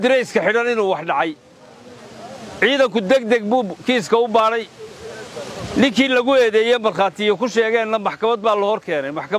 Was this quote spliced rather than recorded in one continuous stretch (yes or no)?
no